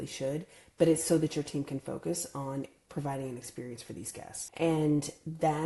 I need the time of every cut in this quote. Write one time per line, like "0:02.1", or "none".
0:04.4